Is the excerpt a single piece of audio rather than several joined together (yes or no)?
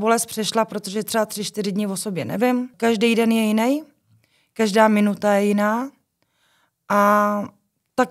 no